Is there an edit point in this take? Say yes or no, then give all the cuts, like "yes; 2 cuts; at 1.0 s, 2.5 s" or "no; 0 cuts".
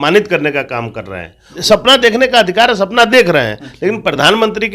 yes; 1 cut; at 1.6 s